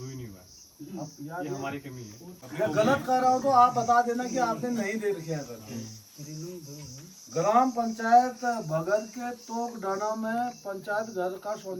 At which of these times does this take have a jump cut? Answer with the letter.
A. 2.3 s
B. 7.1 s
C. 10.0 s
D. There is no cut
A